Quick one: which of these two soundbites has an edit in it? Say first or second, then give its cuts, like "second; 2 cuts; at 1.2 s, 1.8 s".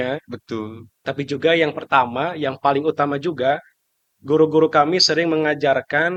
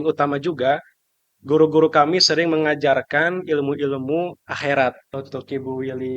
second; 1 cut; at 5.1 s